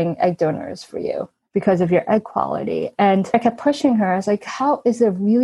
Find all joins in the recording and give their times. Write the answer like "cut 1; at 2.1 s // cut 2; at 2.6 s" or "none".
cut 1; at 1.4 s // cut 2; at 3.3 s